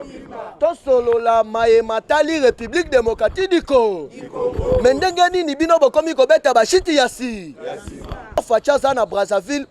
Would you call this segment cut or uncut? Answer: cut